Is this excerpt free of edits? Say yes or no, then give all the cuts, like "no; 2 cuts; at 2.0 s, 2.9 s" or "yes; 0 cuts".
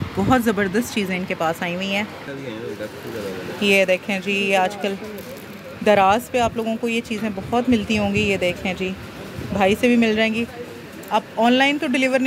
yes; 0 cuts